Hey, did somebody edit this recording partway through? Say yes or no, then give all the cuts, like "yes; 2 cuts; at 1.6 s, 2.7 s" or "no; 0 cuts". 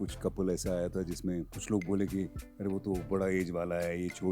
no; 0 cuts